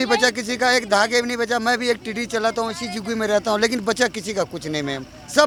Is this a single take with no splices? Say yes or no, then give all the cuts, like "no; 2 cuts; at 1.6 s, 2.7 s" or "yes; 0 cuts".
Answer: yes; 0 cuts